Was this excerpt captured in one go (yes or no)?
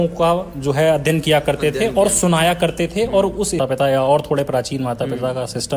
no